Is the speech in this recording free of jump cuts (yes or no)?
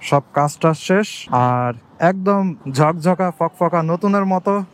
no